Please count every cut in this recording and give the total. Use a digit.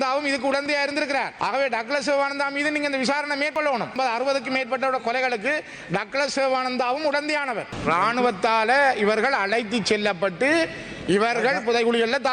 2